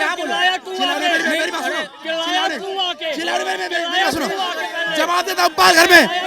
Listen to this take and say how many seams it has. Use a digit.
0